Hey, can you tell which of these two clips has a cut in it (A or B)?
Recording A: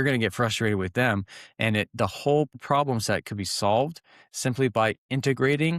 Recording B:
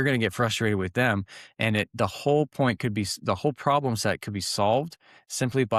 A